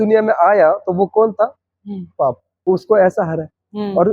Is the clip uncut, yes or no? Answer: no